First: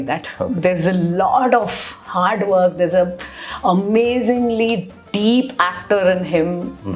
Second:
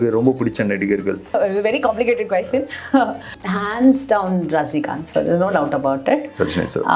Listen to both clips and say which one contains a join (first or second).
second